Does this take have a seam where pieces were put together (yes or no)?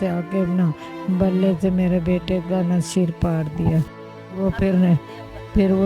no